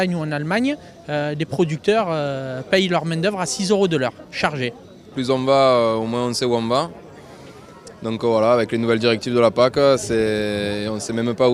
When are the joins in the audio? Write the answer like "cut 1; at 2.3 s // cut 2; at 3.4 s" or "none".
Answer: cut 1; at 8.0 s